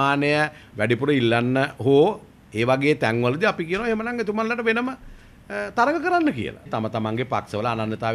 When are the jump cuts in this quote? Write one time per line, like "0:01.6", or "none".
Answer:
0:06.7